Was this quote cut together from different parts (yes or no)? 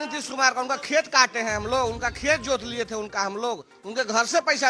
no